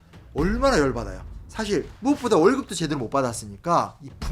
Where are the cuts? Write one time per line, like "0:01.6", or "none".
0:01.9